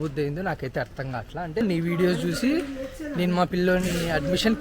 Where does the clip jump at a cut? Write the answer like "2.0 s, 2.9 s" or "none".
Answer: 1.6 s